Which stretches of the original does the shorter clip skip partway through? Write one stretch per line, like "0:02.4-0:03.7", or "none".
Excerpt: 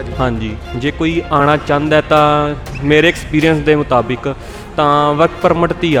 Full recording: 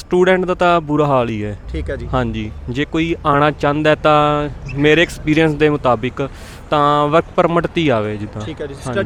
none